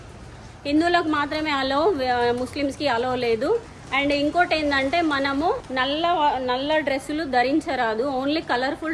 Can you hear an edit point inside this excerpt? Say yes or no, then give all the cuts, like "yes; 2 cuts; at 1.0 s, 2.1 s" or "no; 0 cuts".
yes; 1 cut; at 5.6 s